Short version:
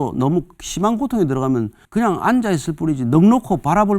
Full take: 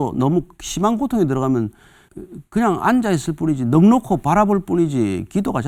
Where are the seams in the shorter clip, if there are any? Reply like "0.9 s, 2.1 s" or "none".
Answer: 1.8 s